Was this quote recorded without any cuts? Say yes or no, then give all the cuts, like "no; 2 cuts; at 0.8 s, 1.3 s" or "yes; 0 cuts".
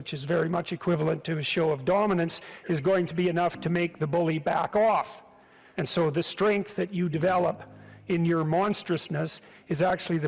yes; 0 cuts